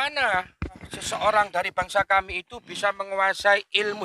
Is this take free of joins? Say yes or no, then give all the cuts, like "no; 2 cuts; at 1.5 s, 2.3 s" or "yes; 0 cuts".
no; 1 cut; at 0.9 s